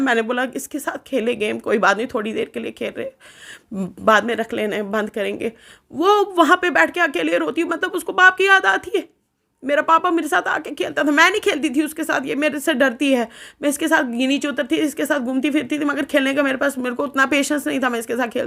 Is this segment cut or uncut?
uncut